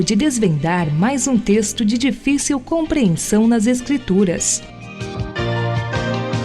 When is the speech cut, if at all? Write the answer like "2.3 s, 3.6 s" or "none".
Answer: 4.5 s